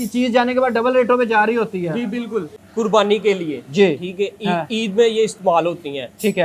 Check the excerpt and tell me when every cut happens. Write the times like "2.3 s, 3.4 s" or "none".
2.6 s